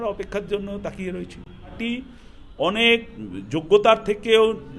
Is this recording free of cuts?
no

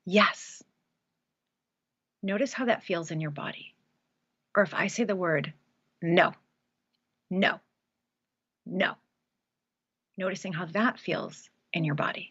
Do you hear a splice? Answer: no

